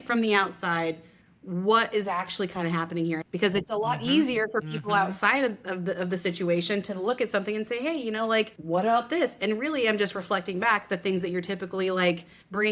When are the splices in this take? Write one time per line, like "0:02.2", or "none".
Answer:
0:03.2
0:08.6